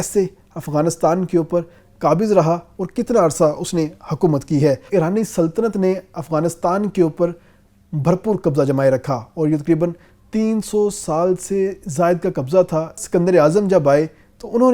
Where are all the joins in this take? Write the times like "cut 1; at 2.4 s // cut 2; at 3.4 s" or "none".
cut 1; at 4.9 s // cut 2; at 13.0 s

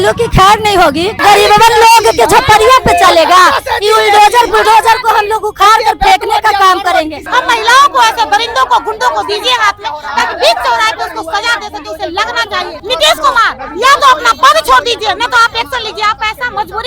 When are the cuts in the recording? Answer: cut 1; at 1.2 s // cut 2; at 7.2 s // cut 3; at 12.8 s

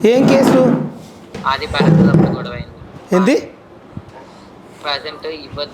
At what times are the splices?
none

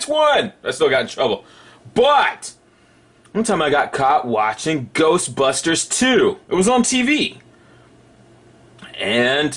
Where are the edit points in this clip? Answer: cut 1; at 6.9 s

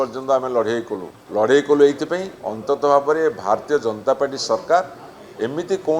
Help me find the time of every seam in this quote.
cut 1; at 1.2 s

